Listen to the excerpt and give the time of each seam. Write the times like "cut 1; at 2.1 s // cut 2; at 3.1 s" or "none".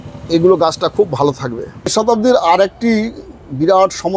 cut 1; at 1.9 s